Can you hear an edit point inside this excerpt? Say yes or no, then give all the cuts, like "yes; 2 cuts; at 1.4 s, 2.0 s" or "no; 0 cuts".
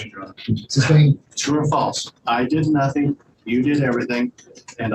yes; 1 cut; at 1.3 s